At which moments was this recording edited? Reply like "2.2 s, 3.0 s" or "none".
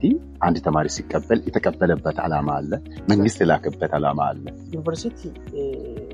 4.7 s